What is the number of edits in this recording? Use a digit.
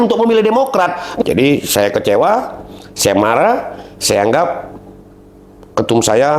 1